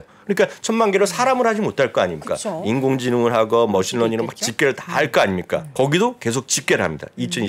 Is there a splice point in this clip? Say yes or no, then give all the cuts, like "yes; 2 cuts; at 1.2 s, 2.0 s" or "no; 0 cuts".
yes; 1 cut; at 5.7 s